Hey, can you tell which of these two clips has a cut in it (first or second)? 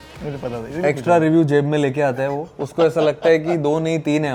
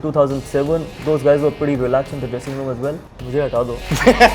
second